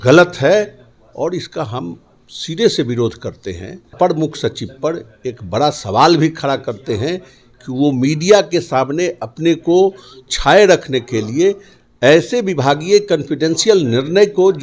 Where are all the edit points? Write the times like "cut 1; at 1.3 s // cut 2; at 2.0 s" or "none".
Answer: cut 1; at 3.9 s